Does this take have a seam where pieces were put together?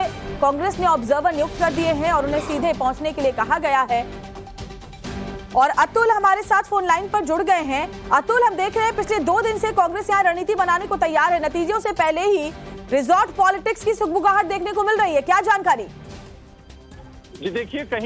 yes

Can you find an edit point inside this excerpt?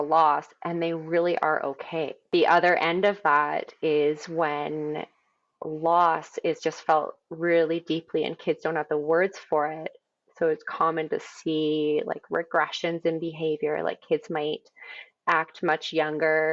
yes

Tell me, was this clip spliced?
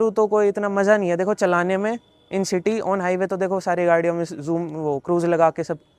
no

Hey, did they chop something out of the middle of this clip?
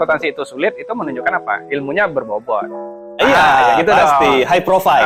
no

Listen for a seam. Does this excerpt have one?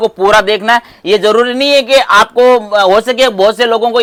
no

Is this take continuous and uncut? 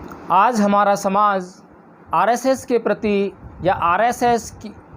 yes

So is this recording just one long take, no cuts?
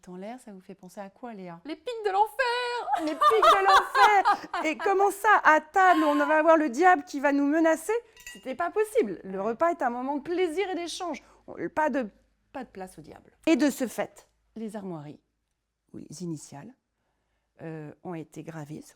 no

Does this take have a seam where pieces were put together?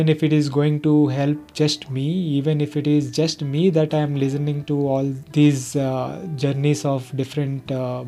no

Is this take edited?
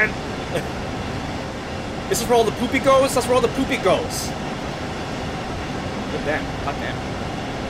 no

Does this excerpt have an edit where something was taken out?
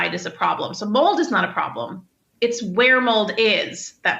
no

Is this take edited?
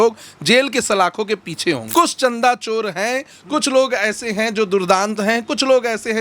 yes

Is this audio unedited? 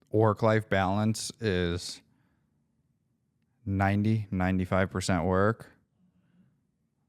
yes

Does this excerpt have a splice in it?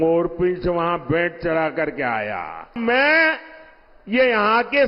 yes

